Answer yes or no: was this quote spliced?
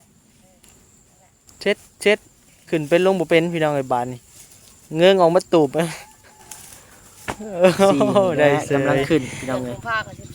yes